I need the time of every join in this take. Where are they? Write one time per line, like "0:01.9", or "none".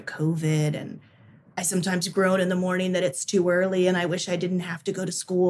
none